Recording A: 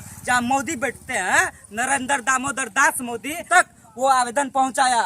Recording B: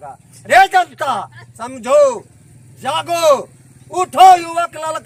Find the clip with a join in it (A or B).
A